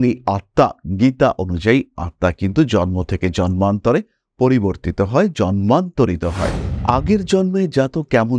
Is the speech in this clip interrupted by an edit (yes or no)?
yes